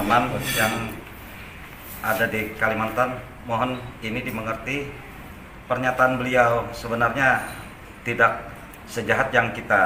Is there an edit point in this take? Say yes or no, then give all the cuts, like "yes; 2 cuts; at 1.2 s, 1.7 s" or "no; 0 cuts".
no; 0 cuts